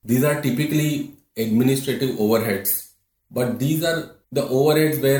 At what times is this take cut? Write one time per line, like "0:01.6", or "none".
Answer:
none

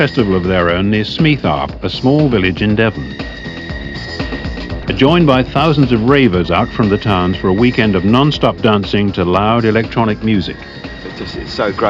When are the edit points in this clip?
0:01.3

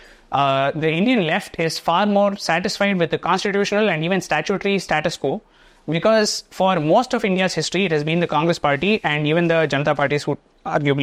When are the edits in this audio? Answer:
none

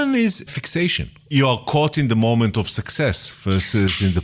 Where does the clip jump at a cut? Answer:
0:01.3

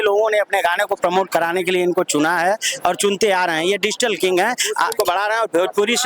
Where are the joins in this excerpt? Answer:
0:04.9

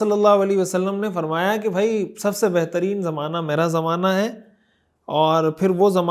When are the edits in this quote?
none

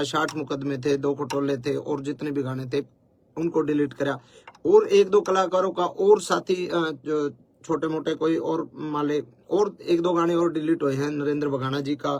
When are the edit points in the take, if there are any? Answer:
none

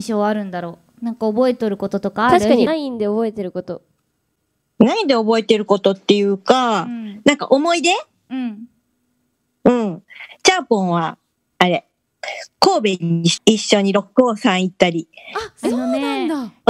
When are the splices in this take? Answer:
0:02.7
0:13.3

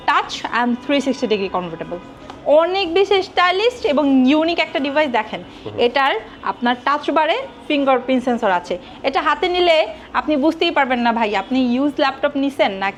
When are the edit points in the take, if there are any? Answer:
none

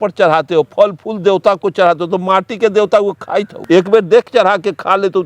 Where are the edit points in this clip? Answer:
0:03.5

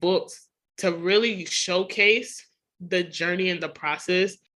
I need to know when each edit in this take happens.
none

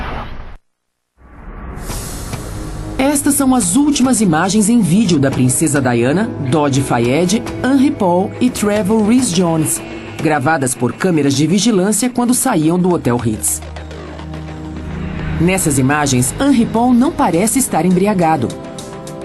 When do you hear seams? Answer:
0:10.7

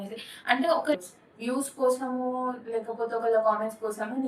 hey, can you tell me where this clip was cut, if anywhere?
0:01.0

